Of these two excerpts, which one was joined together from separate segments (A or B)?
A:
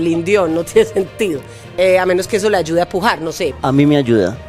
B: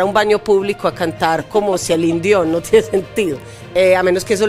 A